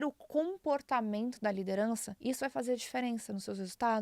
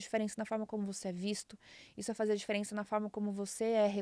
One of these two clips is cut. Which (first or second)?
first